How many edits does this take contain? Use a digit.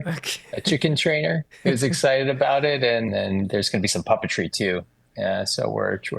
2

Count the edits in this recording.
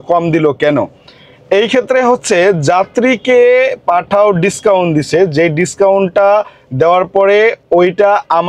0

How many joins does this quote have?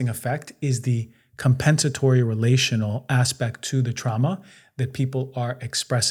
0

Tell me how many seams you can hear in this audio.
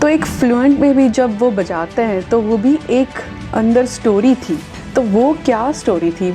1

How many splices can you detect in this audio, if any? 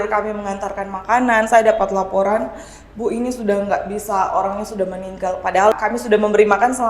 1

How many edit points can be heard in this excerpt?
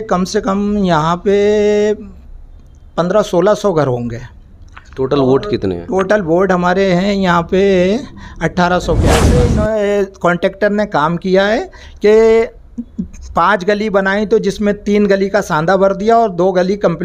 1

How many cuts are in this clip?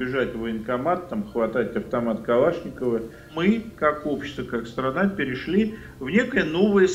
1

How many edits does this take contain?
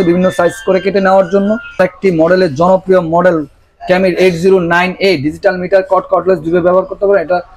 1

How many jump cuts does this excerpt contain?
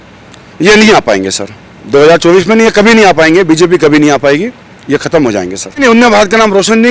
1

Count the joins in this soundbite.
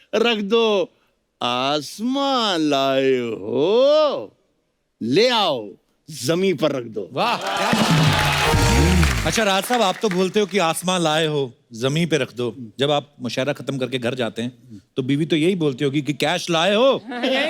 1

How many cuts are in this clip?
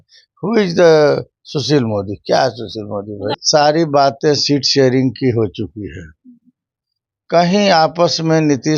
1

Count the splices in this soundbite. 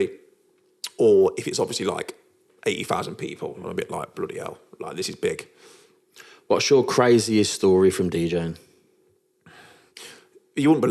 0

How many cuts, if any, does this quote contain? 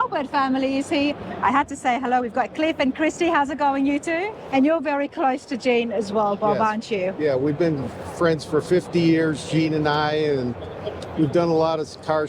1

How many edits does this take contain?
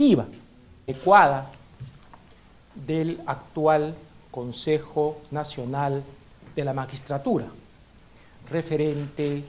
0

